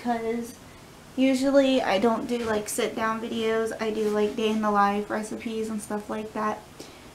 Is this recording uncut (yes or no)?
yes